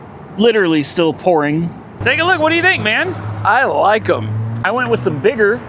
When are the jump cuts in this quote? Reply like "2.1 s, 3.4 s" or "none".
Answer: 1.9 s